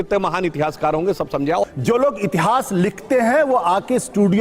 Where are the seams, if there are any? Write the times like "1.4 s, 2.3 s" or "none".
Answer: 1.6 s